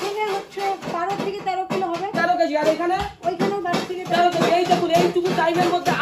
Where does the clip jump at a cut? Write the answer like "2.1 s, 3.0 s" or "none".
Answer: none